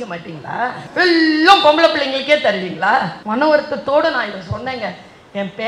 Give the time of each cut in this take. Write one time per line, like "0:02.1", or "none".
0:00.8
0:03.2